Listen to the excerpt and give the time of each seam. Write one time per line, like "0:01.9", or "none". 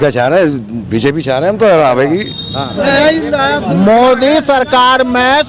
0:02.7